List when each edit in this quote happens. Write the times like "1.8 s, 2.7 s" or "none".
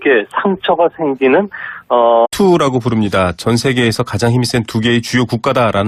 none